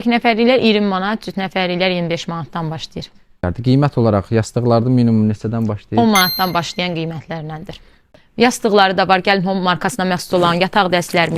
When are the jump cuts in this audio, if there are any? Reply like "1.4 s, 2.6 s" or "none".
3.4 s, 8.0 s